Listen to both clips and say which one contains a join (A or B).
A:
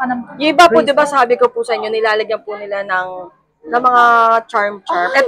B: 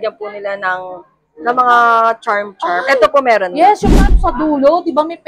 B